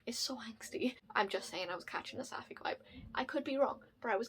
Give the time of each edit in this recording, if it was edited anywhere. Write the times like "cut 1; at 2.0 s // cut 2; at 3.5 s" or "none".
cut 1; at 1.0 s